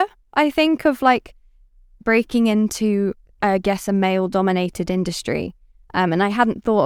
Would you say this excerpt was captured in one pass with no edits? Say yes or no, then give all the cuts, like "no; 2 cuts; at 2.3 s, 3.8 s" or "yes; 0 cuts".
yes; 0 cuts